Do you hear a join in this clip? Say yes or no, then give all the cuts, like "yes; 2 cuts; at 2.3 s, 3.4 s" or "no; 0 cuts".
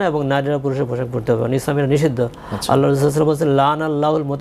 no; 0 cuts